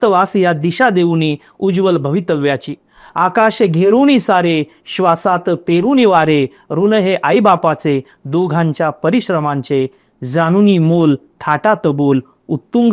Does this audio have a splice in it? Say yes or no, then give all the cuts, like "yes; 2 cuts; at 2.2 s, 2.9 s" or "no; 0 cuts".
no; 0 cuts